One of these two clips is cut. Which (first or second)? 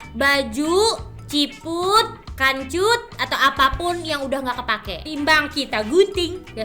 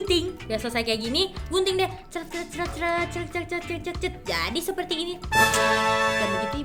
first